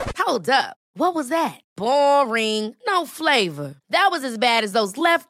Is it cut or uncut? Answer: uncut